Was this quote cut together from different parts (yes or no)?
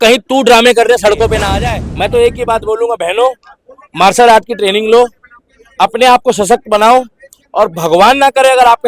yes